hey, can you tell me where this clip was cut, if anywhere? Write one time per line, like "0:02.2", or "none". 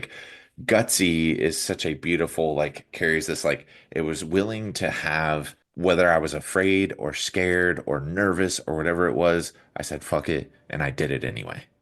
0:05.6